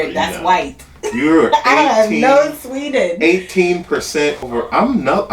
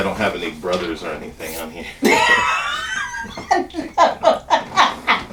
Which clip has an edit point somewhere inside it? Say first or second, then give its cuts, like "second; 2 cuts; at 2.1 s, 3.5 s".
first; 1 cut; at 4.4 s